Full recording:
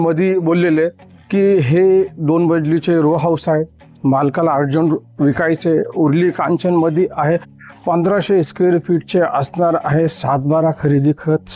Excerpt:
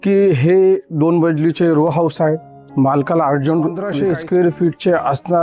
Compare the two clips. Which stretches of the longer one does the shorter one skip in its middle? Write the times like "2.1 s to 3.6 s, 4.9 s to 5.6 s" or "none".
5.1 s to 8.2 s